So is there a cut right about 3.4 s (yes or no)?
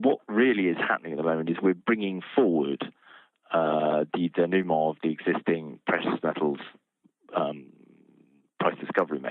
yes